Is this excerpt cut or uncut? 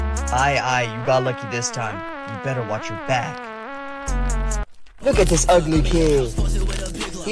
cut